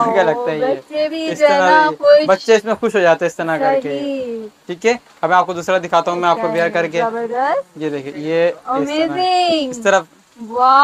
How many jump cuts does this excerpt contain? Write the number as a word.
zero